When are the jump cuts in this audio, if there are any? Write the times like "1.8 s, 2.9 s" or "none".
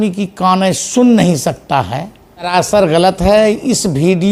2.5 s